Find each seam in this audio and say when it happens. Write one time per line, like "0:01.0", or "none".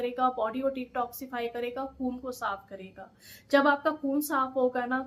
none